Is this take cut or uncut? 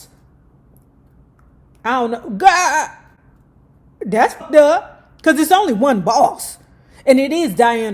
cut